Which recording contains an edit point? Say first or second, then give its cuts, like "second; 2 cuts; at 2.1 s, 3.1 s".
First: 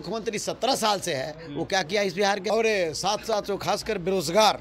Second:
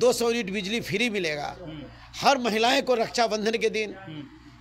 first; 1 cut; at 2.4 s